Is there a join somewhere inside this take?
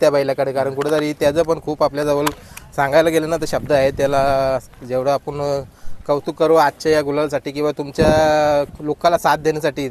no; 0 cuts

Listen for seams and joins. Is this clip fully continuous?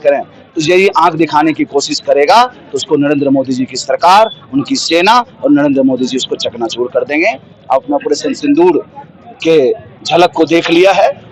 yes; 0 cuts

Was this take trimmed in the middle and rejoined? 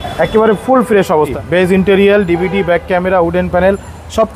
yes; 1 cut; at 1.3 s

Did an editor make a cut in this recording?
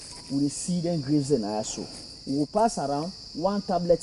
no; 0 cuts

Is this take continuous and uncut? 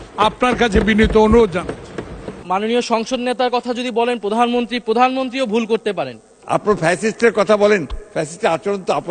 no; 2 cuts; at 2.4 s, 6.3 s

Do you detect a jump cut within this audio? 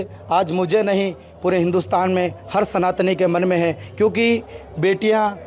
no; 0 cuts

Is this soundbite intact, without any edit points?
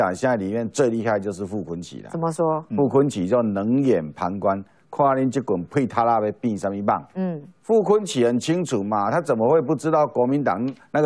yes; 0 cuts

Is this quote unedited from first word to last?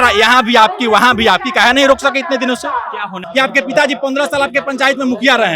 no; 1 cut; at 3.2 s

